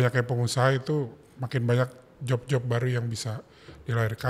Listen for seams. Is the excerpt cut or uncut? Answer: uncut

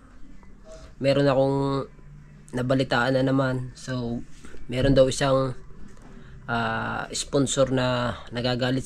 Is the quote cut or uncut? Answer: uncut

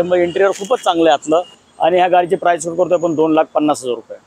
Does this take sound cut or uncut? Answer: cut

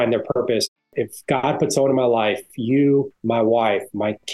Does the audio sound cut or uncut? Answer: cut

